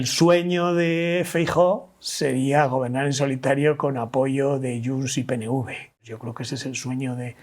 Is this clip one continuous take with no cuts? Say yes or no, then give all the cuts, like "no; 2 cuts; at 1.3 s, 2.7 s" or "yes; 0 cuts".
no; 1 cut; at 6.0 s